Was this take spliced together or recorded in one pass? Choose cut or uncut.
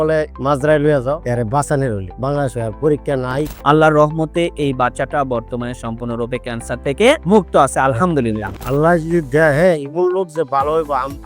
cut